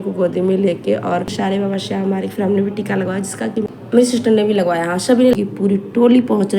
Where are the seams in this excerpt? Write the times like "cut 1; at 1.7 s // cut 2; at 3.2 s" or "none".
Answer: cut 1; at 1.3 s // cut 2; at 3.6 s // cut 3; at 5.3 s